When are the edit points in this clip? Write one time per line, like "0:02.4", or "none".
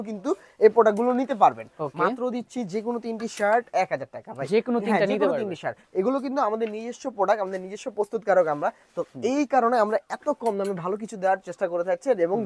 none